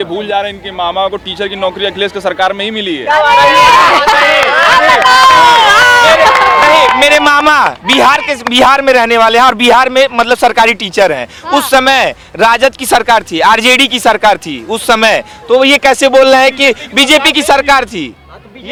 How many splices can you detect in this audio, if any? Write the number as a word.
zero